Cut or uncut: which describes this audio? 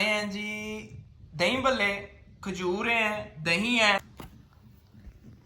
cut